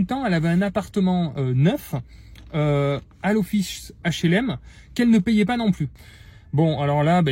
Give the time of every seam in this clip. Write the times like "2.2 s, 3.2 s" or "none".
6.0 s